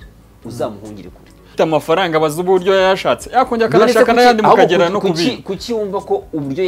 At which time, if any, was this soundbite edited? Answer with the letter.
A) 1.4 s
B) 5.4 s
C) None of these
A